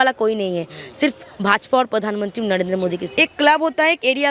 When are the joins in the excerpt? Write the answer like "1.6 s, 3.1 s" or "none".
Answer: 3.1 s

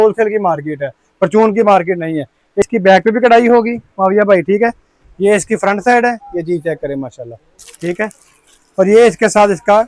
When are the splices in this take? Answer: 2.6 s

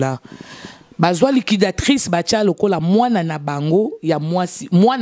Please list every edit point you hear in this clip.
none

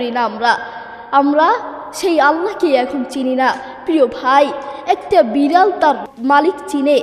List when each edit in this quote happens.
6.1 s

